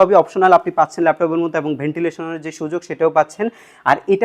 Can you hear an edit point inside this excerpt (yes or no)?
no